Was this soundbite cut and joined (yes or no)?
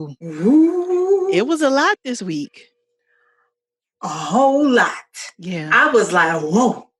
no